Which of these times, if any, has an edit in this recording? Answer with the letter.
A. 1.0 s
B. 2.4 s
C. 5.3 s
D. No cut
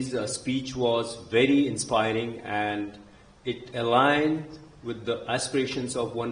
D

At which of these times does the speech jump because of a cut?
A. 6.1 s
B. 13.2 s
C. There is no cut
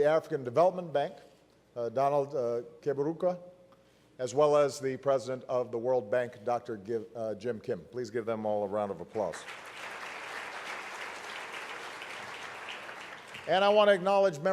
A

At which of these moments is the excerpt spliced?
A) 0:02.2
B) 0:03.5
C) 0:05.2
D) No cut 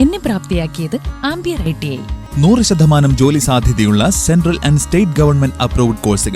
A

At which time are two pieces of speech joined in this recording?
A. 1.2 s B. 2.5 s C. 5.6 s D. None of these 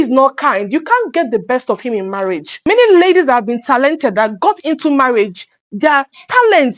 B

